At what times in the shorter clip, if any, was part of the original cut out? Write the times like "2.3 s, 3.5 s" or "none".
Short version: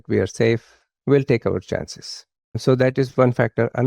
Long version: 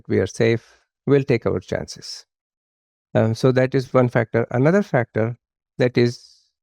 2.6 s

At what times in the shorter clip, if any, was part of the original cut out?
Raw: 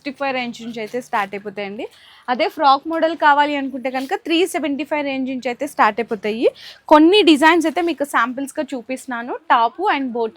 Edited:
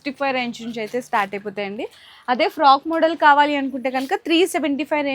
none

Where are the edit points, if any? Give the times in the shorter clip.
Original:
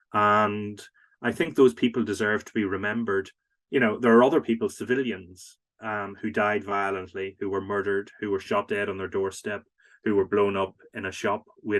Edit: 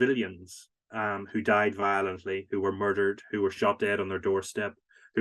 none

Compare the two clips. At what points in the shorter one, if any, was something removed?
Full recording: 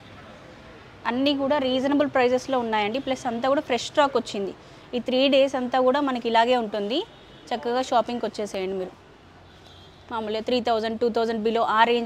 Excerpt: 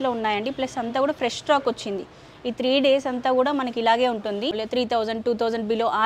4.6 s

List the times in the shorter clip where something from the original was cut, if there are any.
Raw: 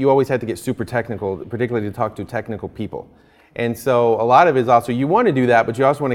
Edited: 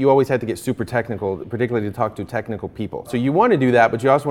3.1 s

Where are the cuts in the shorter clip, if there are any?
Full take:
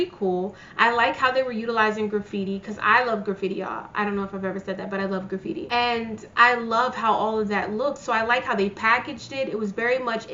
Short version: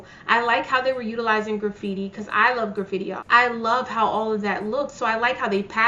3.2 s

